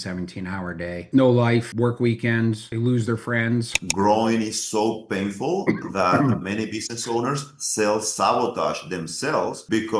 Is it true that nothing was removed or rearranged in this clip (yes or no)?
no